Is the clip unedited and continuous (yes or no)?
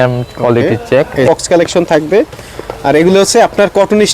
no